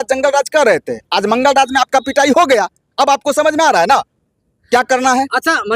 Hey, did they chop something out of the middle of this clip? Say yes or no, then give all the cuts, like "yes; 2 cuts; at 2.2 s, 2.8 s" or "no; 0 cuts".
no; 0 cuts